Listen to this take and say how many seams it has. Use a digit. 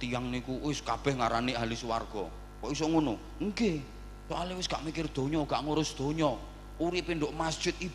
0